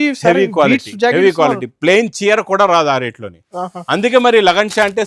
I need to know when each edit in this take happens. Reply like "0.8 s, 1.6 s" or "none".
none